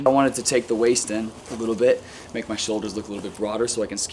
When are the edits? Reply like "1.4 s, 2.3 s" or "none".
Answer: 1.4 s